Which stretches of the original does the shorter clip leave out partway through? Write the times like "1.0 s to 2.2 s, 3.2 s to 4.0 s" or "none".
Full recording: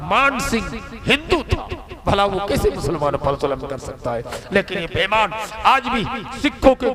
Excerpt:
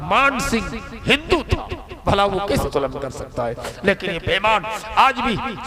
2.6 s to 3.3 s